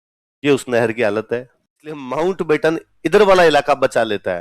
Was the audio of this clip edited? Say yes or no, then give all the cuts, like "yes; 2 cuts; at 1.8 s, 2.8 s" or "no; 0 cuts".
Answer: yes; 1 cut; at 2.1 s